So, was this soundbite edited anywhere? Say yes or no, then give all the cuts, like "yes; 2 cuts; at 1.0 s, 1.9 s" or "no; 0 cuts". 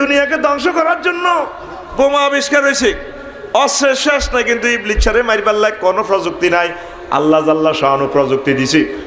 no; 0 cuts